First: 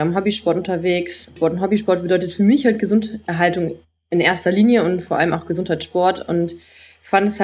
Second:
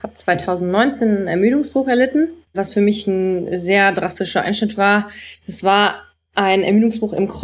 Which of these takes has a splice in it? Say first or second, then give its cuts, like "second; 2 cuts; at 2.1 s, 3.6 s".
first; 1 cut; at 1.3 s